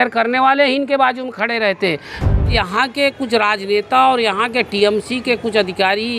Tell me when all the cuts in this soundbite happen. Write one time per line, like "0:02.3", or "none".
0:02.4